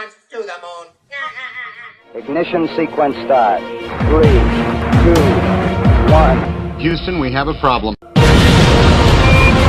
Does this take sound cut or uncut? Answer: uncut